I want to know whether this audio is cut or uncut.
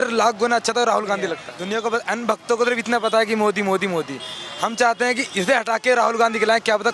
cut